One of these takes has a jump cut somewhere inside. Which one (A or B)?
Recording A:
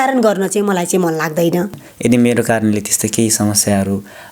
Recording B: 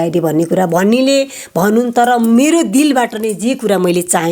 A